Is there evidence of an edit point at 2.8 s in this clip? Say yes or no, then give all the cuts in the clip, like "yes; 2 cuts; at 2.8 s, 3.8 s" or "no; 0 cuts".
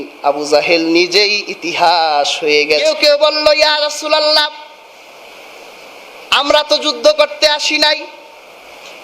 yes; 1 cut; at 2.8 s